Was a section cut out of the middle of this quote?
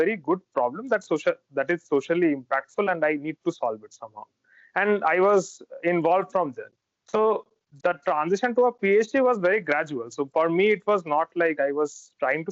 no; 0 cuts

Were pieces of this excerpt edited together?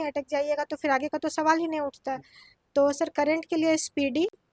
no; 0 cuts

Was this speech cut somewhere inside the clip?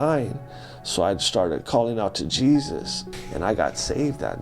yes; 1 cut; at 3.0 s

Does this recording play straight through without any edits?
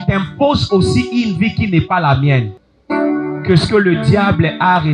yes; 0 cuts

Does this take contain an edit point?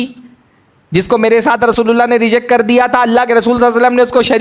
no; 0 cuts

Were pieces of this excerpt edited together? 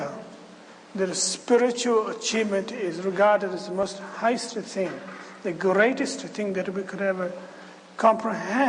yes; 1 cut; at 1.8 s

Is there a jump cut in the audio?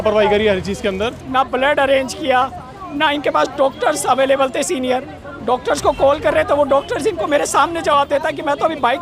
yes; 1 cut; at 1.2 s

